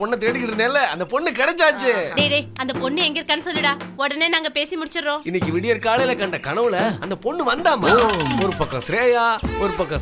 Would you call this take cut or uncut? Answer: uncut